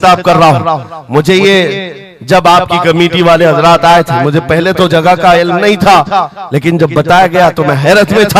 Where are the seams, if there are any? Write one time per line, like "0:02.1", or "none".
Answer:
none